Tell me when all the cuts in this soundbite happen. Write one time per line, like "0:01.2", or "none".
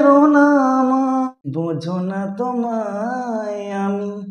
0:01.4